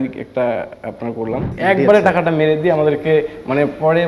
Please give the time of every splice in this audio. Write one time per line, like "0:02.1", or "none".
0:01.5